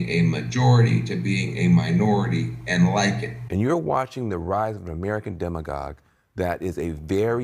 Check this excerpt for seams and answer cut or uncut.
cut